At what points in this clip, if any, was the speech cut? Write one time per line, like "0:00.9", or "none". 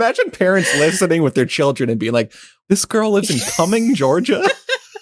0:02.6